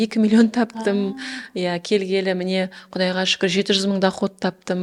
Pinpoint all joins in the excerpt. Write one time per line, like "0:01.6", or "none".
none